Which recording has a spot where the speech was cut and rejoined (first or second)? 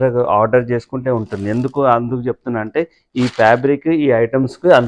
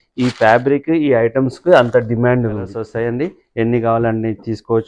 second